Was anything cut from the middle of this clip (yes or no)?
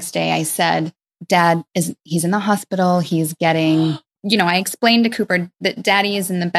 yes